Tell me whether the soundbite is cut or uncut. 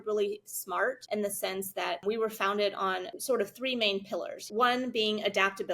cut